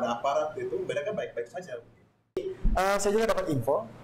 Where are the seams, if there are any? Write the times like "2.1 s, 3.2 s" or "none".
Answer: 2.4 s